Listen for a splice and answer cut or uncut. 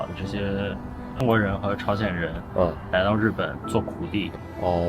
cut